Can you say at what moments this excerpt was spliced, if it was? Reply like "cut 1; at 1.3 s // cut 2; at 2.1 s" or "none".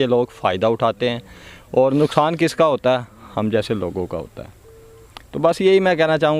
none